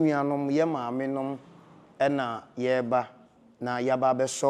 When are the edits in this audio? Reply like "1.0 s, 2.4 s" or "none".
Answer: none